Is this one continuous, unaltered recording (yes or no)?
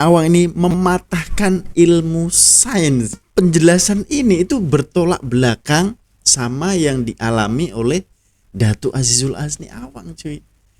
no